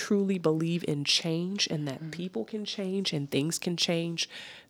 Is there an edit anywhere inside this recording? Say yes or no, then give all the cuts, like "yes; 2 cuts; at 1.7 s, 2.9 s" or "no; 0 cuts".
no; 0 cuts